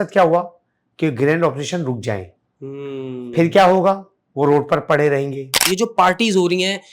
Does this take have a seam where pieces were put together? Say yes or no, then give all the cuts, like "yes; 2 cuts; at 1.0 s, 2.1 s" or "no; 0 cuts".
yes; 1 cut; at 5.7 s